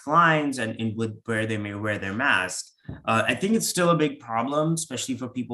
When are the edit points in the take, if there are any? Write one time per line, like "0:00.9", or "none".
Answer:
none